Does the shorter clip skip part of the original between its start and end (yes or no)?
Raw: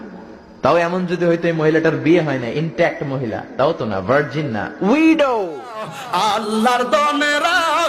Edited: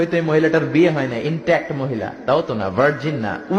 no